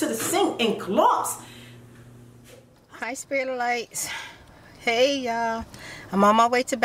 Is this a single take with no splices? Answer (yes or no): no